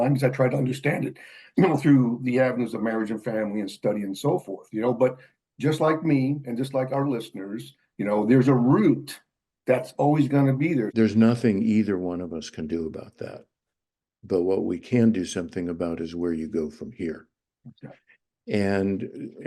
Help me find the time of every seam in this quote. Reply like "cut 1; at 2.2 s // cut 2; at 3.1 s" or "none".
cut 1; at 10.9 s